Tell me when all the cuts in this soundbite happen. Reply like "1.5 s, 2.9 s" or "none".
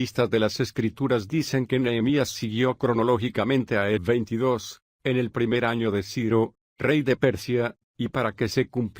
none